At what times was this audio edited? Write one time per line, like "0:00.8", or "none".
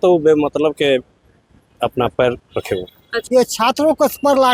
0:03.1